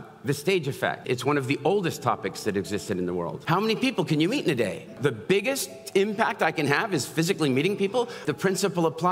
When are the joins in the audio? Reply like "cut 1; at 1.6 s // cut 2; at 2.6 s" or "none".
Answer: cut 1; at 1.0 s // cut 2; at 3.4 s // cut 3; at 5.0 s // cut 4; at 8.2 s